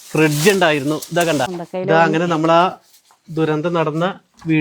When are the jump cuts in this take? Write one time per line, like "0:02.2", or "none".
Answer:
0:01.6